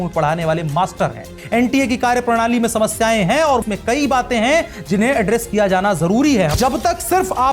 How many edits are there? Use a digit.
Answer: 3